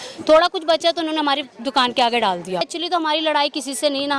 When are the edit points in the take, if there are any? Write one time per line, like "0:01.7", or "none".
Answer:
0:02.7

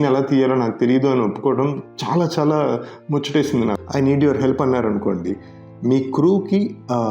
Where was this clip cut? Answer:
0:03.8

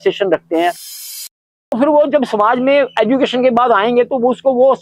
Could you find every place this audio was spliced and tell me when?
0:01.2

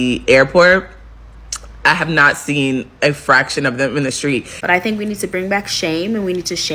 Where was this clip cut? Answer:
0:04.5

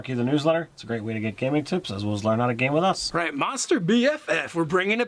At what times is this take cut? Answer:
none

